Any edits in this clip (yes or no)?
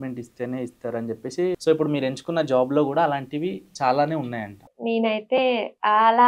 yes